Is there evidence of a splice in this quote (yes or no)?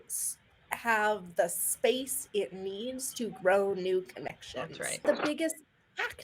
yes